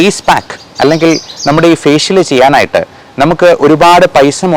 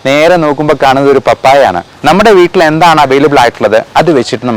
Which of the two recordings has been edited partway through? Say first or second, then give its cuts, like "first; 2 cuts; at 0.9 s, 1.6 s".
second; 1 cut; at 1.9 s